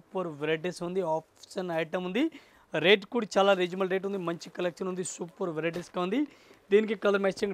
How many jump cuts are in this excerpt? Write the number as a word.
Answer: zero